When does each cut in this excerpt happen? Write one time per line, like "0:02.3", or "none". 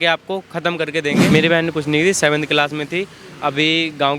0:01.3